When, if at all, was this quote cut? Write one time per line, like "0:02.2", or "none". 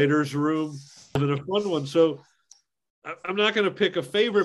0:01.1
0:02.6

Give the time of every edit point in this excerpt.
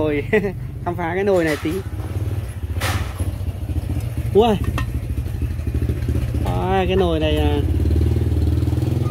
none

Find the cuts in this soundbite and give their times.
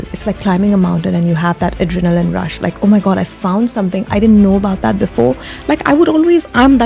0:05.5

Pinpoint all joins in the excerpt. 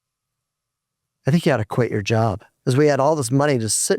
0:02.5

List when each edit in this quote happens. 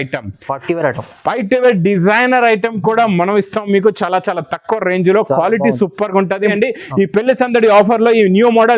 0:06.5

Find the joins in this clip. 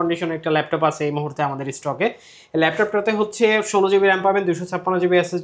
none

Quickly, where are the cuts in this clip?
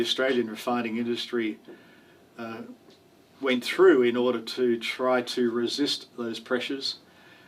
none

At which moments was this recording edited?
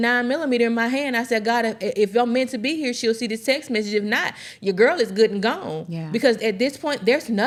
none

